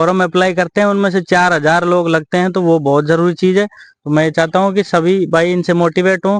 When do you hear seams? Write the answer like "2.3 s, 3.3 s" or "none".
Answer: none